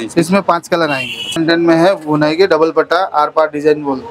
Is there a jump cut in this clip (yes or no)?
yes